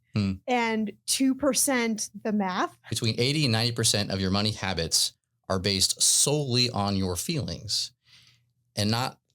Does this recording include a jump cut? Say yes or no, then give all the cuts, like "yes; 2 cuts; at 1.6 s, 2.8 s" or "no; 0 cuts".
yes; 1 cut; at 2.9 s